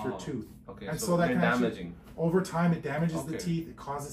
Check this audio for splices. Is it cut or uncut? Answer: uncut